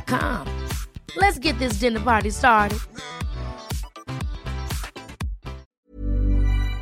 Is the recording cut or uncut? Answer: cut